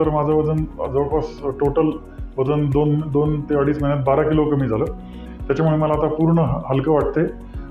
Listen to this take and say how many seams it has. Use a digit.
1